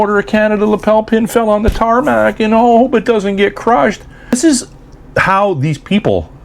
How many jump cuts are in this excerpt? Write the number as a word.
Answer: one